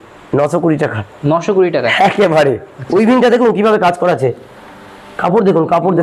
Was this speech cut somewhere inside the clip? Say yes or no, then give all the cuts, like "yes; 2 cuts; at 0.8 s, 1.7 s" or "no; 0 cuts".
yes; 1 cut; at 2.7 s